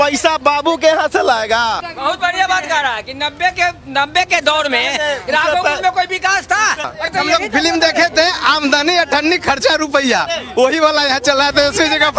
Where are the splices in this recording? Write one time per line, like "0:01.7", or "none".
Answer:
0:01.9
0:06.9